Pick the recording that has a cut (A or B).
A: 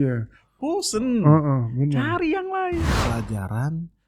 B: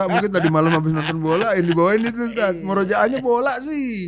A